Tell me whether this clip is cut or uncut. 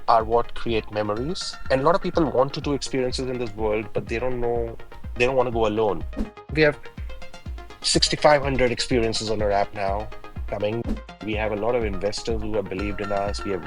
cut